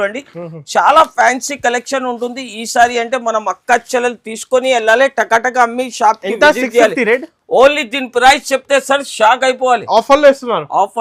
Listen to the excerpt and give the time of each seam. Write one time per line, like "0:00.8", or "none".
none